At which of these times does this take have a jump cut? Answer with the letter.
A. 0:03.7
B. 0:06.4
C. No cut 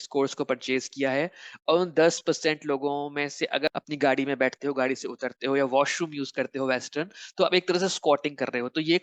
A